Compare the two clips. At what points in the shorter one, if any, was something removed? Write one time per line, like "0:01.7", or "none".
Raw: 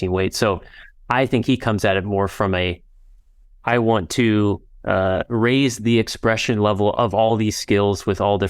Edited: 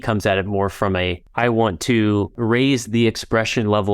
0:01.2
0:02.4